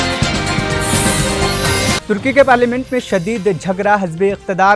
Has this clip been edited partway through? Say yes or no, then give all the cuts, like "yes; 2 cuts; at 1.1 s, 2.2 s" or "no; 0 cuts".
yes; 1 cut; at 2.0 s